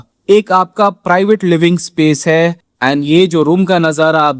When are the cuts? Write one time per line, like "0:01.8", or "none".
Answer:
0:02.6